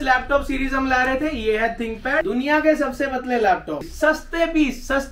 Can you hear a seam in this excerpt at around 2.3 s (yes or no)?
yes